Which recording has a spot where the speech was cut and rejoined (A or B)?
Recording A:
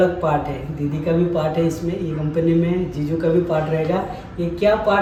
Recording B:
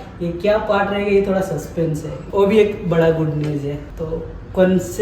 B